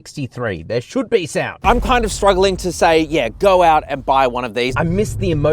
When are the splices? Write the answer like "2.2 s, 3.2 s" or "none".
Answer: 1.6 s, 4.7 s